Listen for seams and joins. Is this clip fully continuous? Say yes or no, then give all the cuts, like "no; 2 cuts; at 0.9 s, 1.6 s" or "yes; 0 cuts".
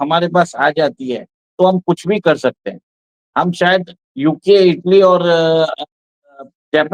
yes; 0 cuts